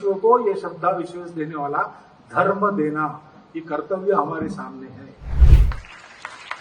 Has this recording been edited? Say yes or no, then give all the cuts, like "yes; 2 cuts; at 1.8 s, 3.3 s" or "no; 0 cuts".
yes; 1 cut; at 5.5 s